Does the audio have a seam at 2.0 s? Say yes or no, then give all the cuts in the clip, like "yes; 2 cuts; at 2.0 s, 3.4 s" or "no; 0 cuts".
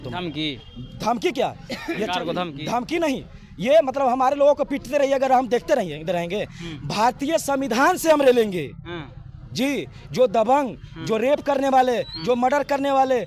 no; 0 cuts